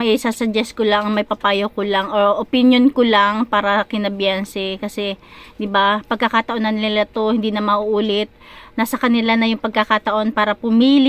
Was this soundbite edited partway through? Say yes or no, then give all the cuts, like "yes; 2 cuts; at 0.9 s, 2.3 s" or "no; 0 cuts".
no; 0 cuts